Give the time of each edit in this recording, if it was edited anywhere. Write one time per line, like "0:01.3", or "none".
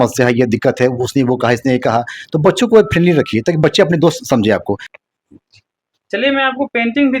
0:04.9